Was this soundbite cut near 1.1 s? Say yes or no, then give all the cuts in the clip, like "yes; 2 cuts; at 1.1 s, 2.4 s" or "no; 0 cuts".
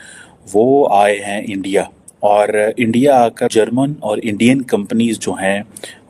no; 1 cut; at 3.5 s